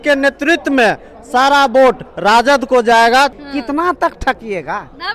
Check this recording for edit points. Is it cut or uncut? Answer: cut